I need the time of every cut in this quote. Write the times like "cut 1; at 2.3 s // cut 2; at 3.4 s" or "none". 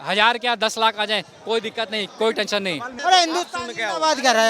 cut 1; at 2.9 s

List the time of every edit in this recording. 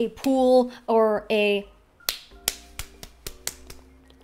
cut 1; at 1.9 s

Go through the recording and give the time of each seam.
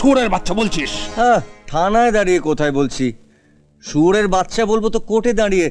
none

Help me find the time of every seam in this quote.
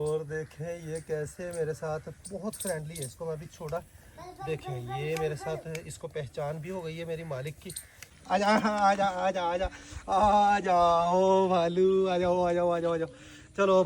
cut 1; at 8.1 s

